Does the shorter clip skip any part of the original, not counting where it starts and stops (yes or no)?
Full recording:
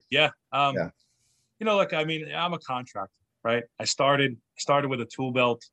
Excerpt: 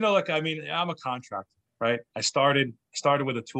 no